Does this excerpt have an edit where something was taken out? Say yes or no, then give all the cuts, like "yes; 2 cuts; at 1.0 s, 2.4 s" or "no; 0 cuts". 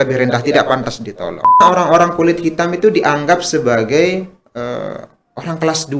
yes; 1 cut; at 1.6 s